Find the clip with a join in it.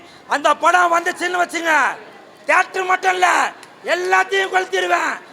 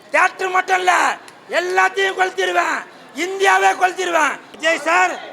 second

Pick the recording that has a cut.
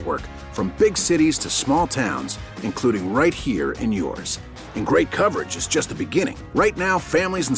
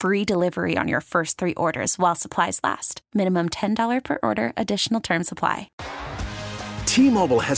second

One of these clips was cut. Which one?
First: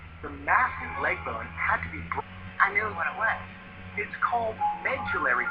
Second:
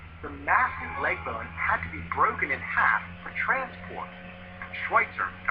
second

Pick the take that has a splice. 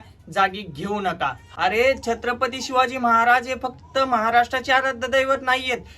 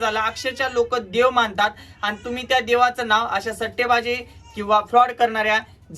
first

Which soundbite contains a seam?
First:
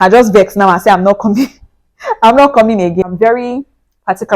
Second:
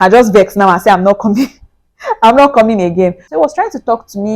first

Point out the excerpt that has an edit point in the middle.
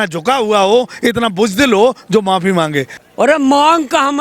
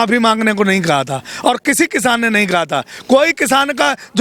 first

